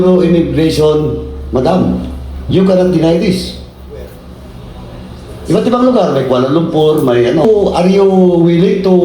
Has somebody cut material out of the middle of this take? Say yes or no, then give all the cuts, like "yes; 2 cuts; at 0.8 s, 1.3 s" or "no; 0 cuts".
yes; 1 cut; at 7.4 s